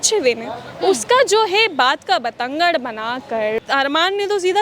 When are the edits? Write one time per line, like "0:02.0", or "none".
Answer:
0:03.6